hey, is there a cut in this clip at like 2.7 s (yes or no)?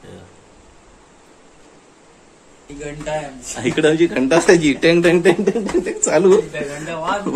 yes